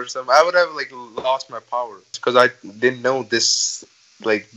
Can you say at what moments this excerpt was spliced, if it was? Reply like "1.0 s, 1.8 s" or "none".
2.1 s